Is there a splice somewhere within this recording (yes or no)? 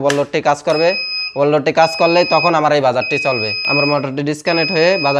yes